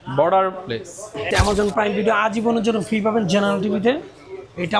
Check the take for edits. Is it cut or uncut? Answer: cut